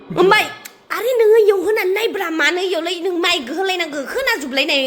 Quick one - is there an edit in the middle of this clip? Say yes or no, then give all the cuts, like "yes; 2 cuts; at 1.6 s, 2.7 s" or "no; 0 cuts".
no; 0 cuts